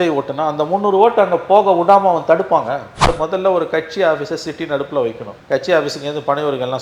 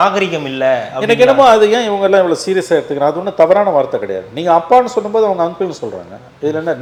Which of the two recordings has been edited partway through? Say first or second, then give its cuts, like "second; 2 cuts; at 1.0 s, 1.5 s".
first; 2 cuts; at 3.1 s, 5.3 s